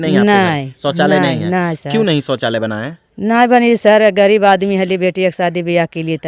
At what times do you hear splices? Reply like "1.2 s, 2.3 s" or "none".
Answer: none